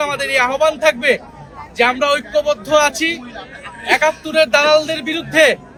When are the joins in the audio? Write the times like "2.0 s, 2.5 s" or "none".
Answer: none